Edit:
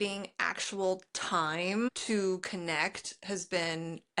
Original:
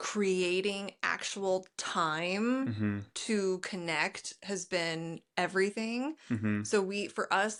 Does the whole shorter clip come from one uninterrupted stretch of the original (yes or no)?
no